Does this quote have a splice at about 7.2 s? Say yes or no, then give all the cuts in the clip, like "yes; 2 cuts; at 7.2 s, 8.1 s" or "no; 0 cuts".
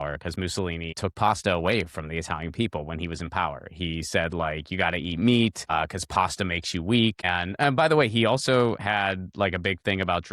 yes; 3 cuts; at 1.0 s, 5.7 s, 7.2 s